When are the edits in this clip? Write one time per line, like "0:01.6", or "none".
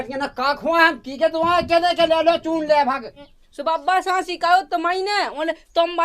0:03.4